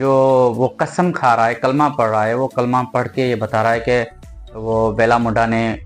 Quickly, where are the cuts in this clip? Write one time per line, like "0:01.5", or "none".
none